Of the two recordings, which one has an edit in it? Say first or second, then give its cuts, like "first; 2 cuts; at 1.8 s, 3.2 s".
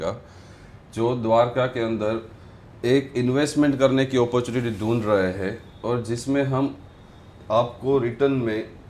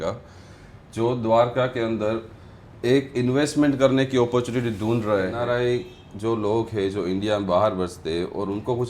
second; 1 cut; at 5.3 s